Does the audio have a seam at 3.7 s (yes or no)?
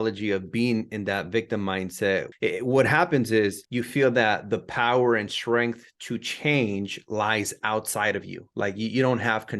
yes